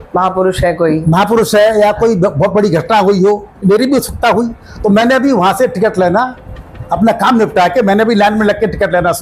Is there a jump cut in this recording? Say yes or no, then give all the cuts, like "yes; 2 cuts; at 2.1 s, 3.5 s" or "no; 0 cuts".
yes; 1 cut; at 3.6 s